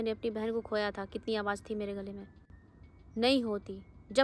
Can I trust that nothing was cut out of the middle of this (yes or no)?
yes